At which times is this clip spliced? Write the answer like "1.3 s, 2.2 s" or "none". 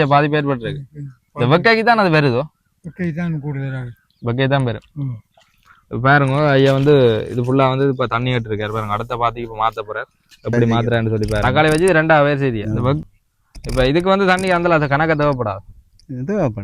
11.4 s